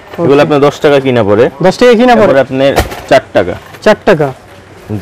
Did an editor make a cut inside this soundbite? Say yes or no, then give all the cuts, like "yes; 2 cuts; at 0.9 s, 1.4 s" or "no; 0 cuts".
yes; 1 cut; at 2.3 s